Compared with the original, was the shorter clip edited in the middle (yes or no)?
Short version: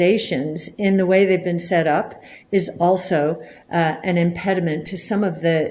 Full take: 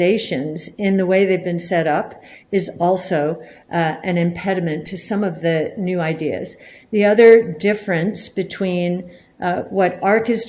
no